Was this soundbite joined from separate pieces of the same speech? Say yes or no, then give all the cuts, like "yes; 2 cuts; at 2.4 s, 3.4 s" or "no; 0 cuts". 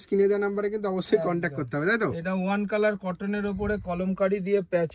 no; 0 cuts